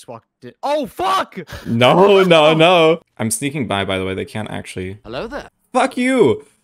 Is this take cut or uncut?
cut